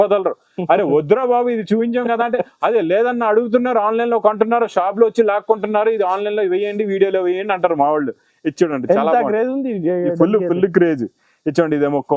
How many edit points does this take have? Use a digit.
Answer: 0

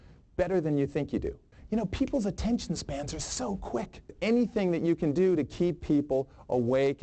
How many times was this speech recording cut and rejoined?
2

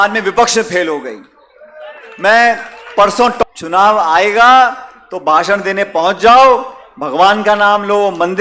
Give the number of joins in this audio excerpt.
1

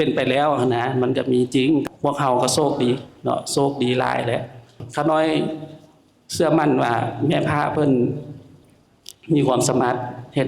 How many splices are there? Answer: 2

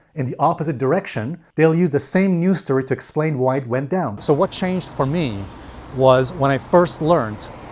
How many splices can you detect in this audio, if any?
1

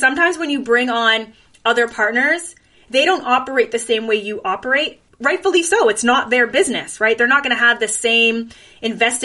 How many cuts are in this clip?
1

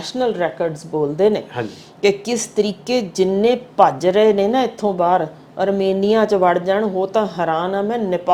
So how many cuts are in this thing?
0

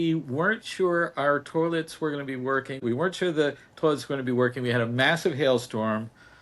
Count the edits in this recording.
1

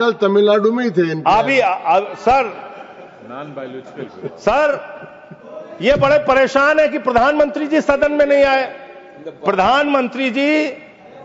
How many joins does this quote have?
0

